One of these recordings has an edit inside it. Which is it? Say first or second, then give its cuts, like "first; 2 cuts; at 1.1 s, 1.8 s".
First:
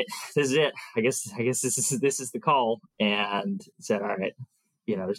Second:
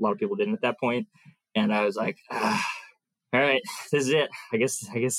first; 1 cut; at 2.9 s